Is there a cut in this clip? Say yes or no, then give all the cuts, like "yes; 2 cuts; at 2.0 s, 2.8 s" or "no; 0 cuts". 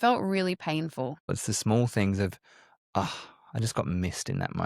yes; 1 cut; at 1.4 s